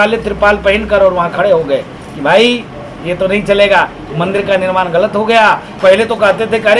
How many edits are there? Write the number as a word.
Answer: one